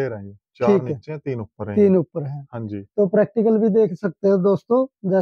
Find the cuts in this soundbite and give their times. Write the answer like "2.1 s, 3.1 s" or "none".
none